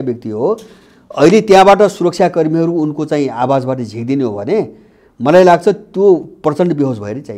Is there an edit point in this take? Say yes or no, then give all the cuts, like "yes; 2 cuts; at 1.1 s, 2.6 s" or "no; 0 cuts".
no; 0 cuts